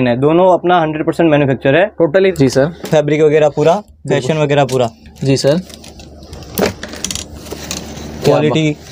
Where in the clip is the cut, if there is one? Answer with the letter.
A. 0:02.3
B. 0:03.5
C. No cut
A